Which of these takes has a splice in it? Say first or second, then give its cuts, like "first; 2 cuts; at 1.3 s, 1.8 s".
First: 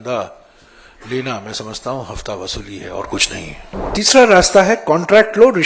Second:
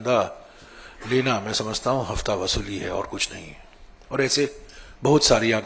first; 1 cut; at 3.9 s